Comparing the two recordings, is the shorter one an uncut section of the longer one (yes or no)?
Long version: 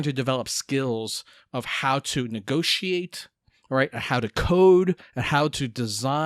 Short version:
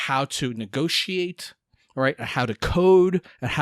yes